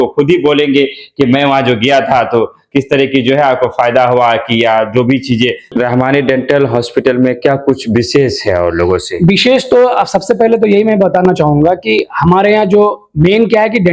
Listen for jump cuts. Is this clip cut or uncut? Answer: cut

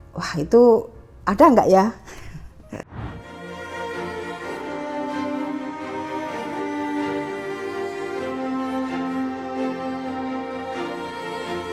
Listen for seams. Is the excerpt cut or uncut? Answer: uncut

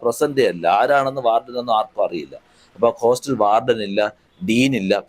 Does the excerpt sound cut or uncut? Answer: uncut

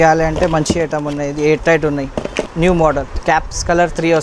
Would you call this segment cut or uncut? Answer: cut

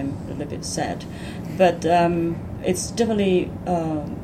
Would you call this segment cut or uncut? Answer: uncut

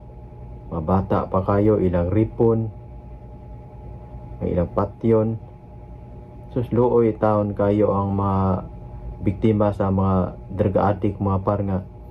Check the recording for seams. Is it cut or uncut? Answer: uncut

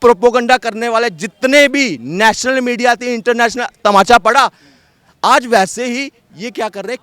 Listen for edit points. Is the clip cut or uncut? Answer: uncut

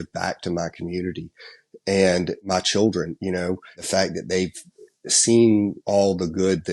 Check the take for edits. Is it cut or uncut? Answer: cut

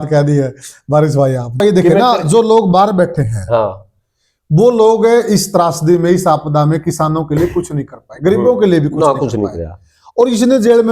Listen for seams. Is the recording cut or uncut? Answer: cut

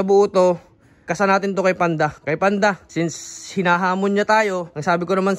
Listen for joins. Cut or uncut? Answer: cut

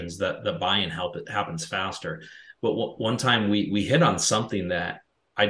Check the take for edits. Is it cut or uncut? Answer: uncut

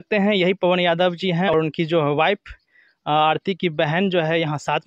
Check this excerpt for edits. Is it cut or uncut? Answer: cut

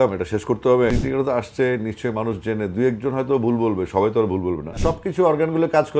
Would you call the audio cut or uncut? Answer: cut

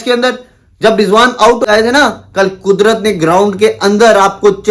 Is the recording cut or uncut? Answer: cut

